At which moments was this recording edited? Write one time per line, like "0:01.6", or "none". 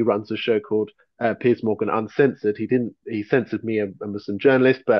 none